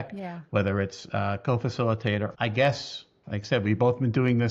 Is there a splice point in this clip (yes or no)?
yes